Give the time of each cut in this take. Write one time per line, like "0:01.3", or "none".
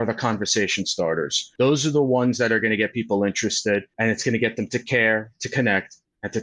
0:01.4
0:03.9